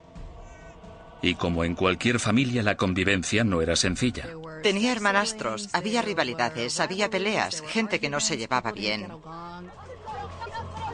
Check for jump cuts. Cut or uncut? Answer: uncut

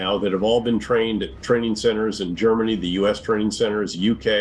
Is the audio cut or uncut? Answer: uncut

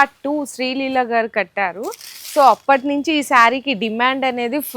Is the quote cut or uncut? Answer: uncut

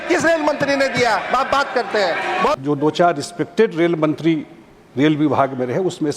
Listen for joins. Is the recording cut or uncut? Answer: cut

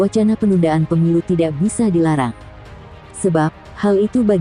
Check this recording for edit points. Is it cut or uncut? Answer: uncut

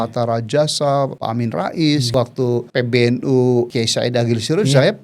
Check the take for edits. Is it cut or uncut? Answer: cut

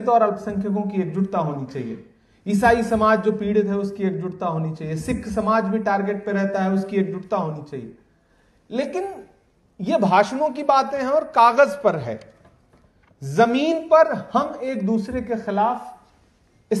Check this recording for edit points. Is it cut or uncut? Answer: uncut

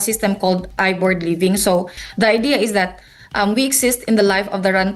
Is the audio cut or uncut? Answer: cut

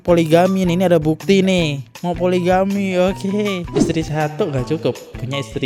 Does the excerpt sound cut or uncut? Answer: uncut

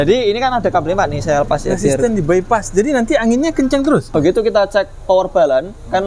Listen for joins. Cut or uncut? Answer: cut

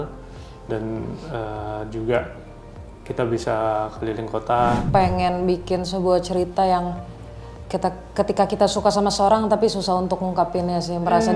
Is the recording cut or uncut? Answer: cut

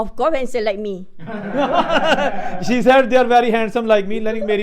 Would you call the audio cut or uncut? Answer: uncut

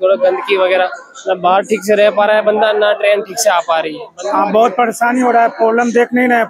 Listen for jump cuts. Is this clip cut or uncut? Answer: cut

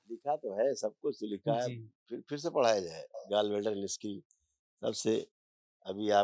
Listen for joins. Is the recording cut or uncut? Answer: uncut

